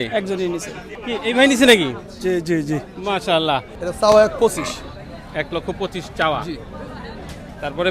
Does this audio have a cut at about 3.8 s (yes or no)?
yes